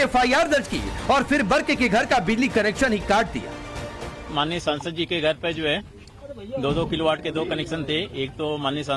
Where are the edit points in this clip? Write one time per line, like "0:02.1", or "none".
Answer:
0:07.2